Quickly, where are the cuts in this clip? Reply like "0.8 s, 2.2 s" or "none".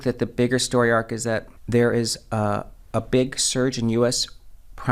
1.5 s